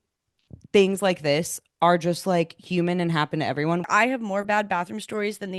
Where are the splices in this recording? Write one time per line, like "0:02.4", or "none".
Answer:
0:03.9